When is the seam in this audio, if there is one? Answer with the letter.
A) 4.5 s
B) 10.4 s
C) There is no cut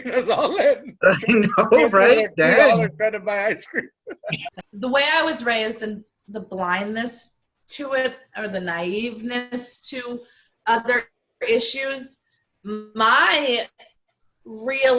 A